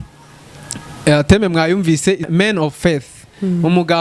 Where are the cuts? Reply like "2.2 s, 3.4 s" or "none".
2.3 s